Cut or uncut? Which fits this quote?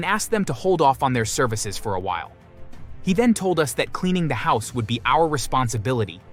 uncut